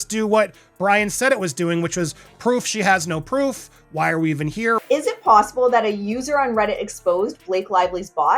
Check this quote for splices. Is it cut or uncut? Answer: cut